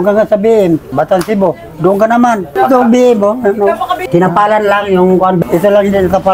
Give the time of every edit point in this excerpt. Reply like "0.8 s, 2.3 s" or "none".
0.9 s, 2.5 s, 5.4 s